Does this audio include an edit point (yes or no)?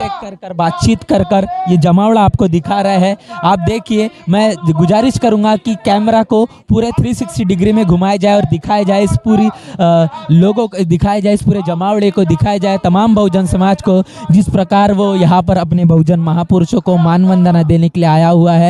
no